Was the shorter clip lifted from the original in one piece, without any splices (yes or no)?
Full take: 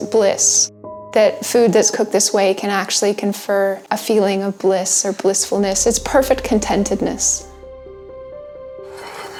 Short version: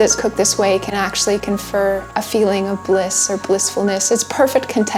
yes